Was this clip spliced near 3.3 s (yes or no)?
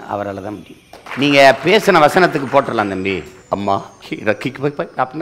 yes